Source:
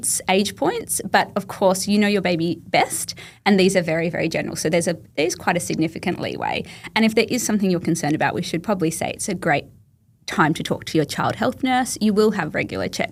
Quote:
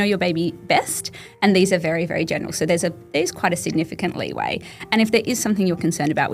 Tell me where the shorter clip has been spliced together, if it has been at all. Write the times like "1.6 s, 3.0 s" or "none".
none

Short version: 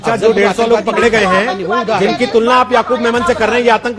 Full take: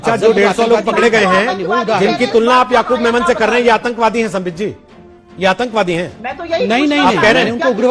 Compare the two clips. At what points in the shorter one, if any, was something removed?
none

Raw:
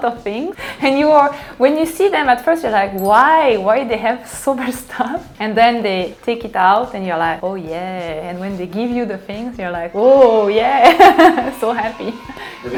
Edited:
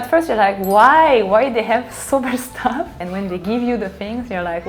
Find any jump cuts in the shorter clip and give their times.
3.0 s

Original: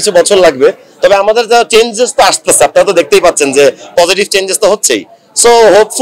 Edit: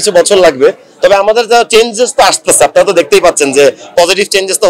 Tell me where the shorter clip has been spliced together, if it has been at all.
none

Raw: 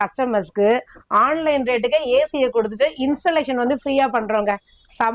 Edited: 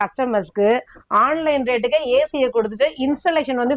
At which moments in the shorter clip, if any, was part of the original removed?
none

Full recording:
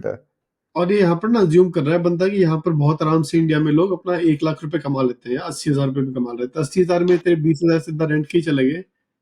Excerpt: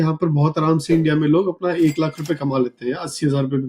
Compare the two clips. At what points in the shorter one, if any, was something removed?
none

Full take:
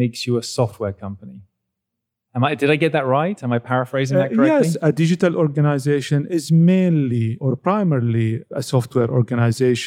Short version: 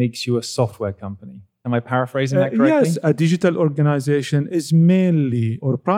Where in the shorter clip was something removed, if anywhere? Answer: 1.6 s

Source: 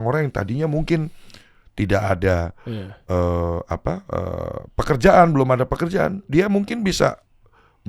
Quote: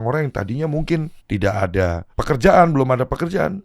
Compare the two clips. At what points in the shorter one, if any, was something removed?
1.2 s, 2.1 s

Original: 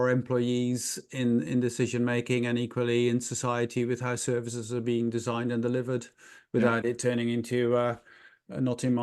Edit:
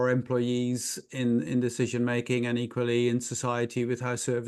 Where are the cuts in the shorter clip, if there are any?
none

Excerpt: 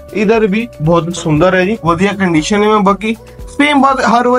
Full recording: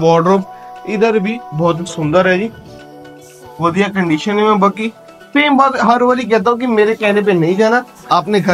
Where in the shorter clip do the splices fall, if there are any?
1.8 s

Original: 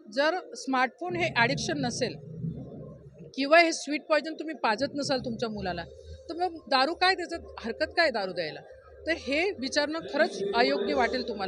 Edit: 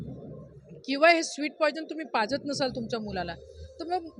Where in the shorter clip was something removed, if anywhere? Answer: none

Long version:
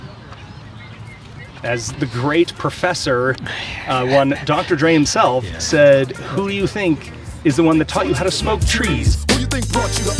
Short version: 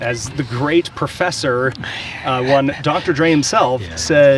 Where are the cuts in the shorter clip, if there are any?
none

